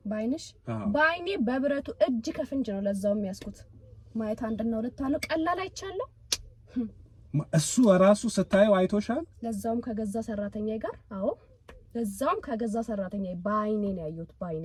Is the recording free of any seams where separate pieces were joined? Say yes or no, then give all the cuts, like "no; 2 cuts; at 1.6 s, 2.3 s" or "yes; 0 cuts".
yes; 0 cuts